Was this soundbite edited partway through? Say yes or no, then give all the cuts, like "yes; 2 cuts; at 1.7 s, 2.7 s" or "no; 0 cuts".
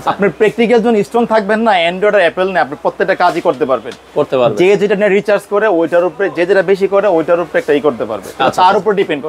no; 0 cuts